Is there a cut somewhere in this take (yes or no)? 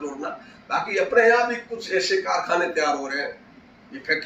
no